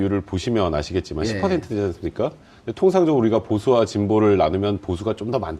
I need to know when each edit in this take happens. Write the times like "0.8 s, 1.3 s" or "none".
3.9 s